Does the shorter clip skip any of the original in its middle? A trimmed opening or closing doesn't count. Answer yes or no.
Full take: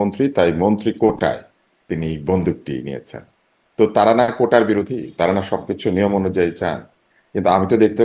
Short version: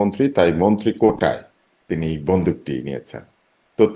no